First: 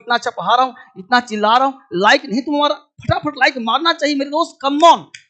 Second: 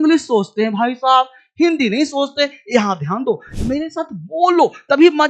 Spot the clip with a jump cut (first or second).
second